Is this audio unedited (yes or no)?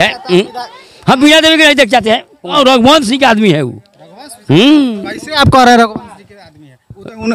no